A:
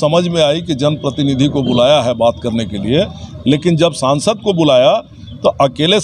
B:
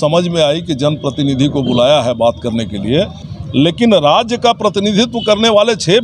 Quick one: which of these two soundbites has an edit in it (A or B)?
B